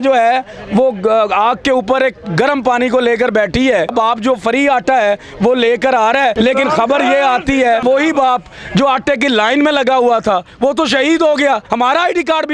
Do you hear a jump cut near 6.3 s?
yes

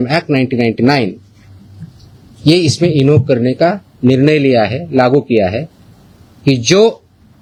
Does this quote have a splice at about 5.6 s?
no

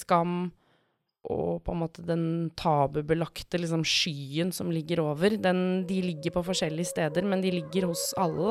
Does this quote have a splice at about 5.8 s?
no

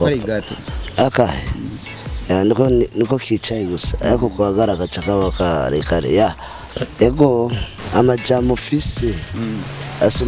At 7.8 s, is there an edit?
yes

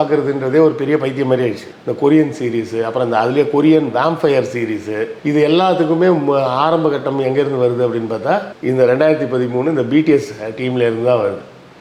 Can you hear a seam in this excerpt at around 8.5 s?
no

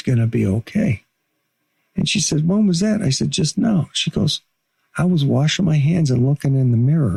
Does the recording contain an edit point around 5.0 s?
no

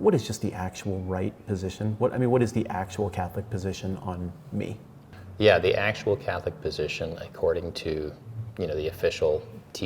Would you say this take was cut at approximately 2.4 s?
no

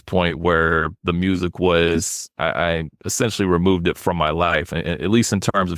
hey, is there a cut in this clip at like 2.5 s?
no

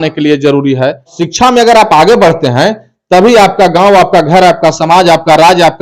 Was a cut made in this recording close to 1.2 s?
yes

